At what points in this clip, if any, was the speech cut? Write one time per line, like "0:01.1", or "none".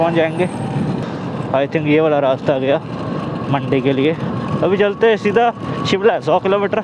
0:01.0